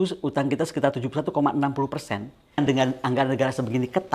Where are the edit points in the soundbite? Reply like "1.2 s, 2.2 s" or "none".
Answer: 2.6 s